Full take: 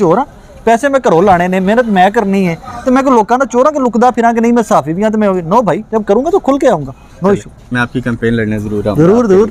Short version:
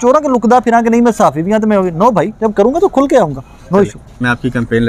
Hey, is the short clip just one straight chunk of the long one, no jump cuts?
yes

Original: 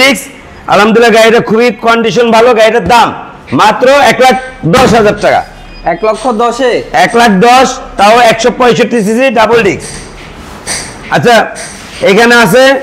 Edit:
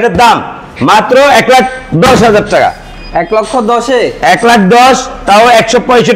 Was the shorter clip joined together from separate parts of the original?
no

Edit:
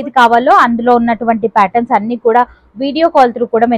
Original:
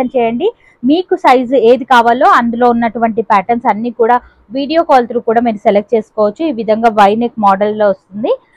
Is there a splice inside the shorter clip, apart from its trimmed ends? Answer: no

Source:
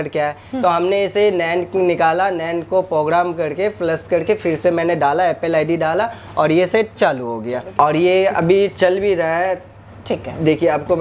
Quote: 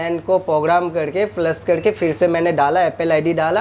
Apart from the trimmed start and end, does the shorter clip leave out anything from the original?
no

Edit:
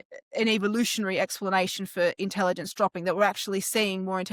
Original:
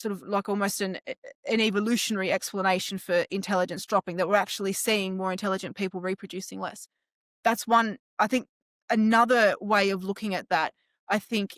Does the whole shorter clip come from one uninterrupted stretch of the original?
yes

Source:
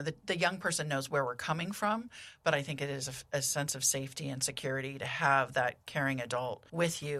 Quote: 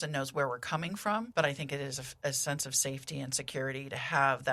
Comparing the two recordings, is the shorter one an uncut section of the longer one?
no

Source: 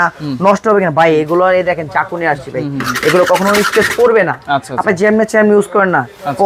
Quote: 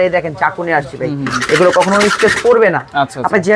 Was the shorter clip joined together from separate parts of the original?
no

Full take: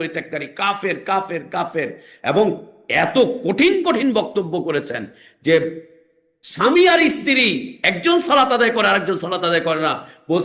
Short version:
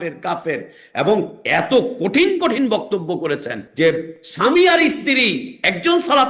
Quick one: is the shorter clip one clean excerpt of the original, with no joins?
no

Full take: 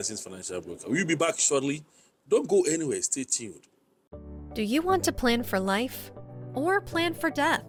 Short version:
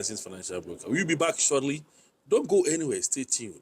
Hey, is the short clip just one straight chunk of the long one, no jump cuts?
yes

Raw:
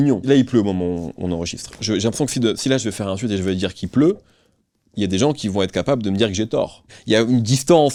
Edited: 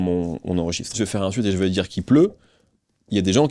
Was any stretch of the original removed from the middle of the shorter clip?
yes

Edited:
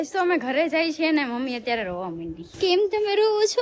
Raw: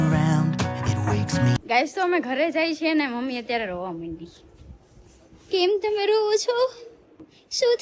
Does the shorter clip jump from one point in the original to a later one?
yes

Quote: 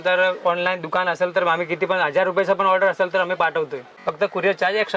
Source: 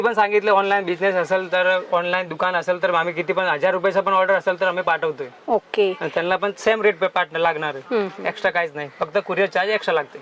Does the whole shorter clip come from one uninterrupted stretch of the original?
no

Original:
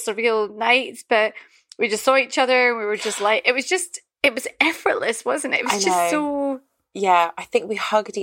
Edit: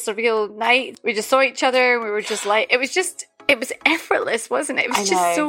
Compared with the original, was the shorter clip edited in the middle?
yes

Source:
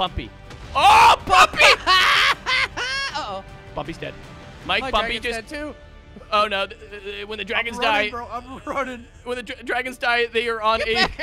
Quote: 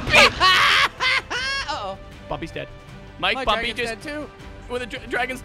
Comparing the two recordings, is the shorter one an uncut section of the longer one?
no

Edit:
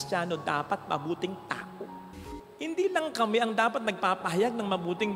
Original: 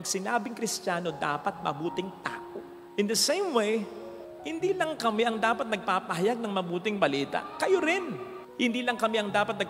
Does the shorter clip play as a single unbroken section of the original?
no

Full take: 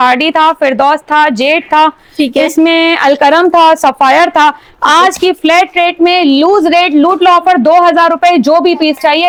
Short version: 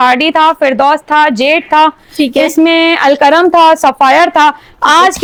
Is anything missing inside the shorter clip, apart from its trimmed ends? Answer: no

